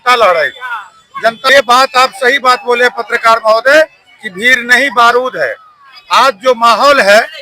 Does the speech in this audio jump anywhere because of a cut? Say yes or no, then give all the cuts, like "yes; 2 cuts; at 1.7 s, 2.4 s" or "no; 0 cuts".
yes; 1 cut; at 1.5 s